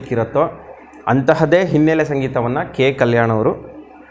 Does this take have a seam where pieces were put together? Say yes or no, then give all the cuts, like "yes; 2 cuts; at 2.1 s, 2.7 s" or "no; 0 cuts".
no; 0 cuts